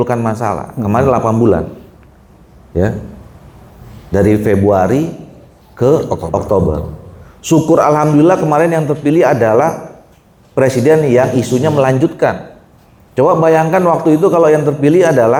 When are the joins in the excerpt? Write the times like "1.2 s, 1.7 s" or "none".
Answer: none